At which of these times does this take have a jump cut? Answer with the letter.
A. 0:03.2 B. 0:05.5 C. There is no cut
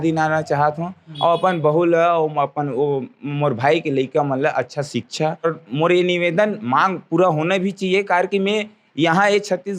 B